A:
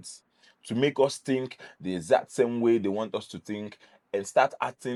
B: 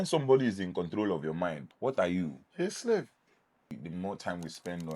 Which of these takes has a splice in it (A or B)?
B